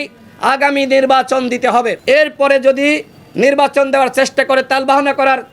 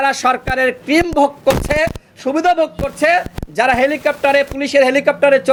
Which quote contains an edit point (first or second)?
first